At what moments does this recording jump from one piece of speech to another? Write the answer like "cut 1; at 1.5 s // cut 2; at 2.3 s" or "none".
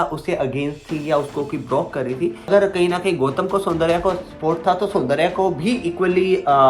cut 1; at 2.5 s